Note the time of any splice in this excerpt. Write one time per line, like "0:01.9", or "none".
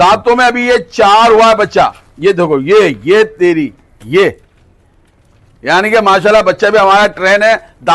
none